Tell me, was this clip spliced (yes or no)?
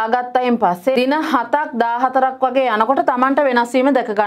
yes